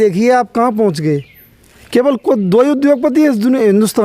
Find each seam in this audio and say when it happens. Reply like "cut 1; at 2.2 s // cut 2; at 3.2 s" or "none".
none